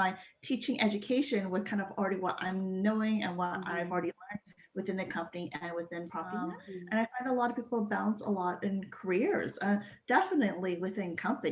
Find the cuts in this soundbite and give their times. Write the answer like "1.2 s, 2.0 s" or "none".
6.6 s